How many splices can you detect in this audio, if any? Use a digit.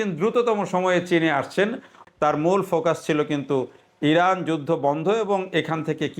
1